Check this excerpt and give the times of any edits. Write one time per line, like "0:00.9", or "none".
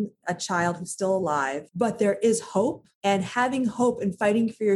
0:01.6
0:02.9